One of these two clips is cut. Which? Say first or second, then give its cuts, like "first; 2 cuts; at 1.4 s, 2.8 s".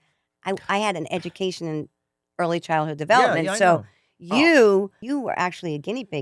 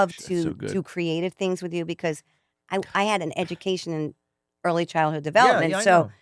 first; 1 cut; at 5.0 s